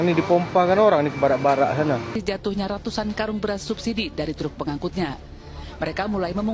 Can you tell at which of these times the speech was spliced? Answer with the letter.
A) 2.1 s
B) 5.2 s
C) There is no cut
A